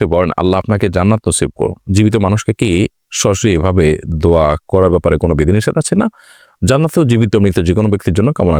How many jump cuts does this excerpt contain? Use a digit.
0